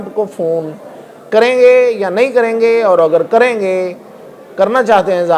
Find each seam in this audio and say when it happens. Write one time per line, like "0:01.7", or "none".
none

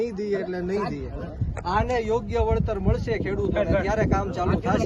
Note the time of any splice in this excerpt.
none

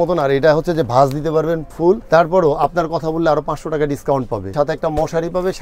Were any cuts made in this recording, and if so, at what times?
0:02.0
0:04.5

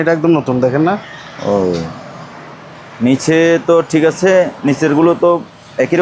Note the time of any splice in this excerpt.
none

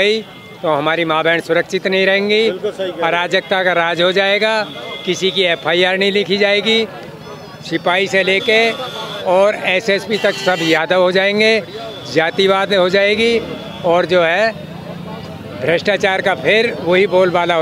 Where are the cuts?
none

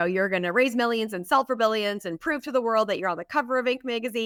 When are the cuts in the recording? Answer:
none

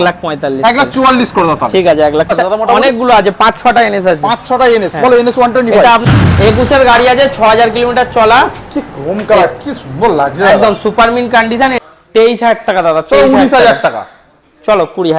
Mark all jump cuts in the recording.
0:02.3
0:06.0
0:11.8

